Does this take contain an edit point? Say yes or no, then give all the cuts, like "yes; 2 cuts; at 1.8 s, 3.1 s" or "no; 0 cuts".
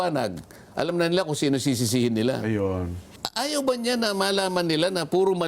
yes; 1 cut; at 3.2 s